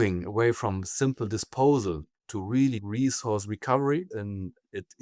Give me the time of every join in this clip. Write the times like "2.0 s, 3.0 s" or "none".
2.8 s, 4.1 s